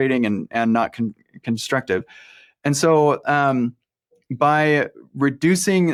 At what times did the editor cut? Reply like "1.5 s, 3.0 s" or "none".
none